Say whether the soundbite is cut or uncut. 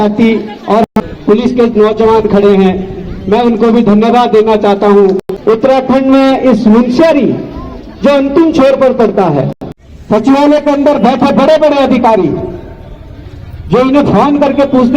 cut